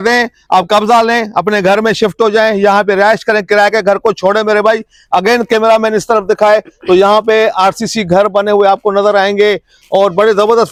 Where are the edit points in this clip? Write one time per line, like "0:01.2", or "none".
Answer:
none

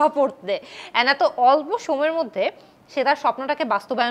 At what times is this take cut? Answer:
none

